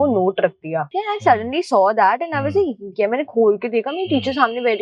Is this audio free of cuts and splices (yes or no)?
no